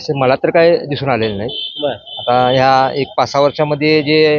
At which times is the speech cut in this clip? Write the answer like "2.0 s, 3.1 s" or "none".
none